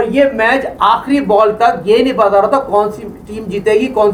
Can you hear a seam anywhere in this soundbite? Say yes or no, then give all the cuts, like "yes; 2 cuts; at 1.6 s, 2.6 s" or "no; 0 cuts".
no; 0 cuts